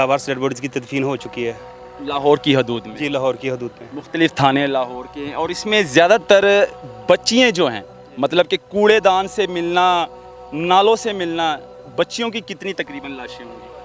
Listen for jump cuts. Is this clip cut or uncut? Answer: uncut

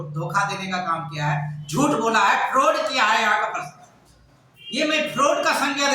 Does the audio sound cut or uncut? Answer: uncut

